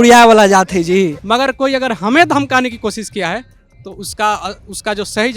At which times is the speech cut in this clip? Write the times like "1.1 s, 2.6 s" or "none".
1.2 s

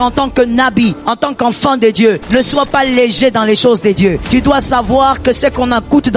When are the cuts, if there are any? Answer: 1.0 s, 2.2 s, 4.2 s

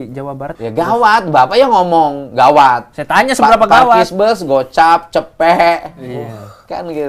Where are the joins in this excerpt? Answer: 0.9 s

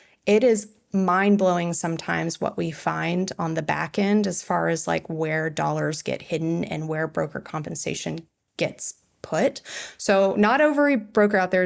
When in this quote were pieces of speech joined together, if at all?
8.4 s

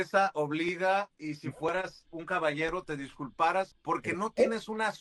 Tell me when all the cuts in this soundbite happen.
3.8 s

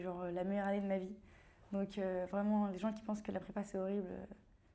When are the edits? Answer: none

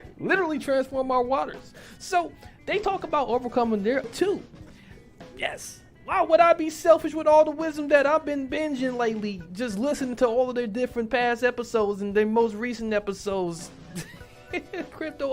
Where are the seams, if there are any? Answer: 4.1 s

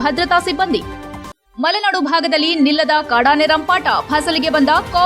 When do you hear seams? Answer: none

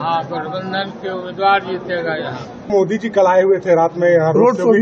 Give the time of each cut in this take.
2.7 s

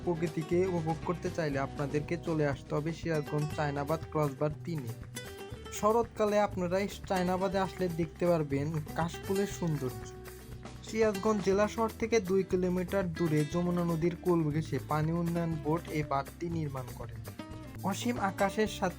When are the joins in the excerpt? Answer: 17.7 s

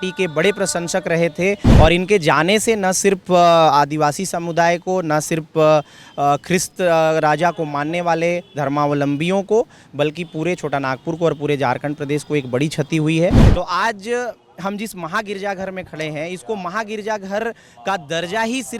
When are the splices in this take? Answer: 1.7 s, 13.4 s

